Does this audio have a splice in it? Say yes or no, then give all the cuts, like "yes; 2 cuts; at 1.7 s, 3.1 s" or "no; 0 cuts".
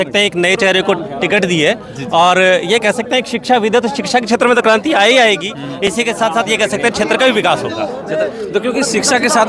no; 0 cuts